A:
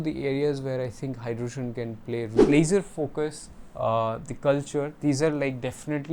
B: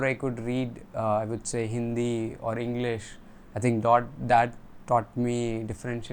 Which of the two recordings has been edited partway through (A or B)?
A